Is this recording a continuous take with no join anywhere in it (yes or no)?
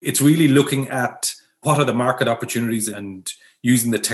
no